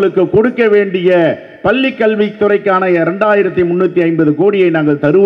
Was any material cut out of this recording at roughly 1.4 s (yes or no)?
no